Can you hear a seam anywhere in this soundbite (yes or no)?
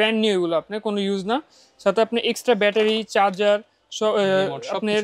no